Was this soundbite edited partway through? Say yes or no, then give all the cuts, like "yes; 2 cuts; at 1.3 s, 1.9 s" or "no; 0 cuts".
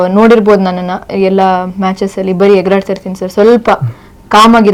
no; 0 cuts